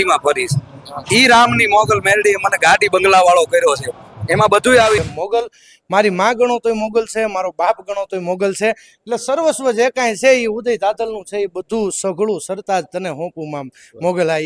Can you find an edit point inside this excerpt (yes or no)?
yes